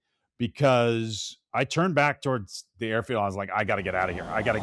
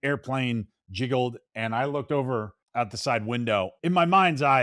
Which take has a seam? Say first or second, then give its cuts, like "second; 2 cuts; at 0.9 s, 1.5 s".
second; 2 cuts; at 2.6 s, 3.7 s